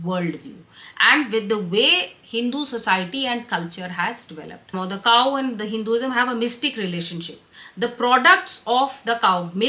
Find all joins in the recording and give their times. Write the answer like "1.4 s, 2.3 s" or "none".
4.8 s